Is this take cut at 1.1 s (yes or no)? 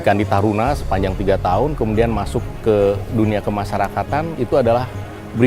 no